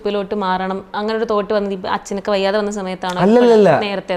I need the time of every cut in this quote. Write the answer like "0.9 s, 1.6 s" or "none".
none